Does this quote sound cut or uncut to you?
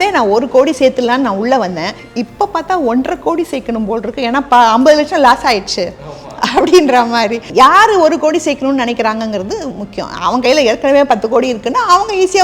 cut